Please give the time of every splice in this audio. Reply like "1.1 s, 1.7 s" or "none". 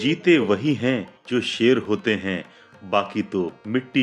none